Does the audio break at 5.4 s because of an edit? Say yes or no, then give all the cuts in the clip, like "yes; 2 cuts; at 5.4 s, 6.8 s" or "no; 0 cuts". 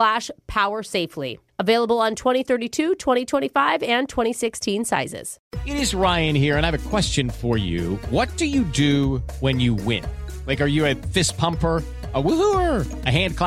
yes; 1 cut; at 5.4 s